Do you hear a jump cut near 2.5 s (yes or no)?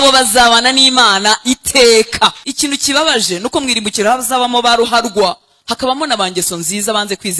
yes